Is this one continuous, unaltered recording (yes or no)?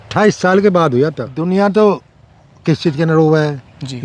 no